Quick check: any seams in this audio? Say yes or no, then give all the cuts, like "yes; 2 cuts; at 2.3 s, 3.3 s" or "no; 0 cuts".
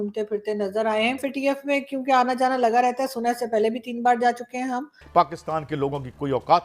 yes; 2 cuts; at 1.2 s, 5.0 s